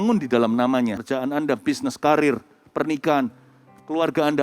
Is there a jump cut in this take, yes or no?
yes